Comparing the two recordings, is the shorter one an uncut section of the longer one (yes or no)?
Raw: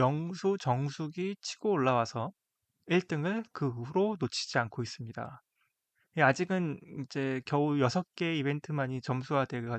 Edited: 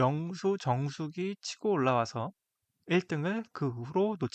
yes